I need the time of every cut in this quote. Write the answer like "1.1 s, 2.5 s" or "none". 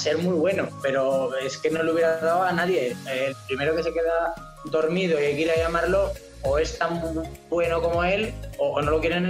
none